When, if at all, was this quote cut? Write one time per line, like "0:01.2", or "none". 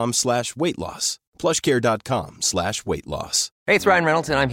0:03.4